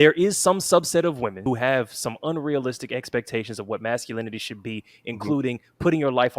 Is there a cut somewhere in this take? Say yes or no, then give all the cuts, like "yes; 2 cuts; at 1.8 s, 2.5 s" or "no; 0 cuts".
yes; 1 cut; at 1.4 s